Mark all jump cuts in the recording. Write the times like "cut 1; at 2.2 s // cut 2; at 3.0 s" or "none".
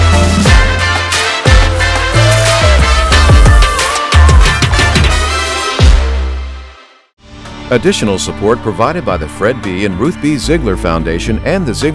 cut 1; at 7.5 s